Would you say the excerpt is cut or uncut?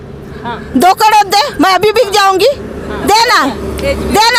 uncut